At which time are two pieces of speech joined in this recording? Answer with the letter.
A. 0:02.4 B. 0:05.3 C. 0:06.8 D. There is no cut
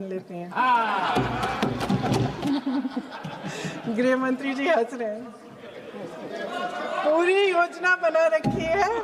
A